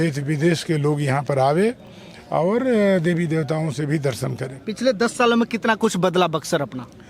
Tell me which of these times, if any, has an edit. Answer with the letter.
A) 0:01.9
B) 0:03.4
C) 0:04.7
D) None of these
D